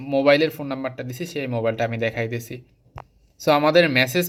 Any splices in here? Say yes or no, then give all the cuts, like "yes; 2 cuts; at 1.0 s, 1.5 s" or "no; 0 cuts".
no; 0 cuts